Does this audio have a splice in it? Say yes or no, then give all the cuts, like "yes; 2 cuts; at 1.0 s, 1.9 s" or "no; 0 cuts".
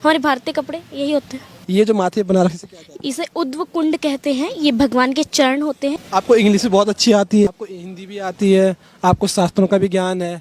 yes; 3 cuts; at 1.5 s, 6.0 s, 7.5 s